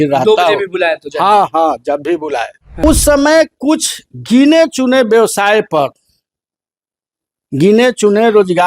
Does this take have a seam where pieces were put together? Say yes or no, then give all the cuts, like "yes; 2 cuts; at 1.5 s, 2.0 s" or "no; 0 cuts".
yes; 1 cut; at 2.8 s